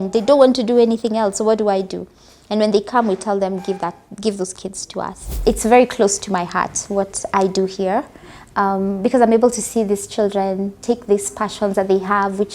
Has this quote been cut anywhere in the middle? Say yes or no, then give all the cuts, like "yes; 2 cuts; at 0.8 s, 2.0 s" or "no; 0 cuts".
yes; 1 cut; at 5.4 s